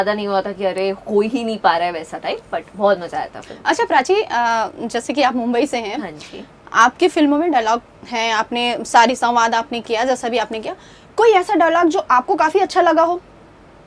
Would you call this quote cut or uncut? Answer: uncut